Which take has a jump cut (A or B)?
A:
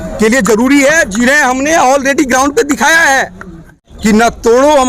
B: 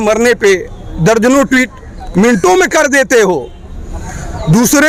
A